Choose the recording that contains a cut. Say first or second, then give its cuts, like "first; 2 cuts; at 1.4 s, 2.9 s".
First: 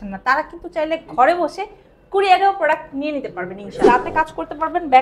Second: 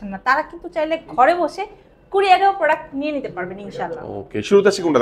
first; 1 cut; at 3.8 s